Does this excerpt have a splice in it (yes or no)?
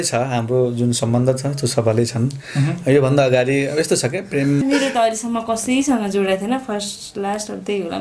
yes